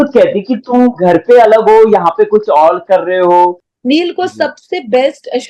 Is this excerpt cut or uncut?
cut